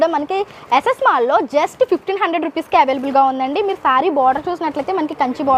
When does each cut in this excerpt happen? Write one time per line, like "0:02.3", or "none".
none